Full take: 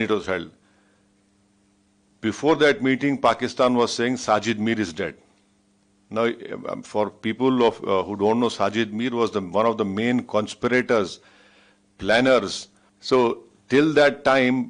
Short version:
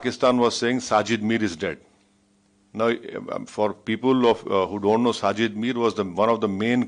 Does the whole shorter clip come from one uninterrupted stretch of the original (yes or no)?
yes